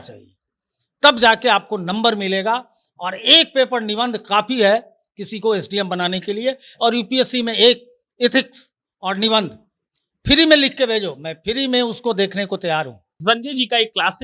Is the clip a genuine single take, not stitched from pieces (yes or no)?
no